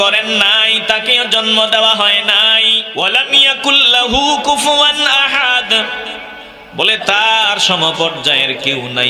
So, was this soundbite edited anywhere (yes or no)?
yes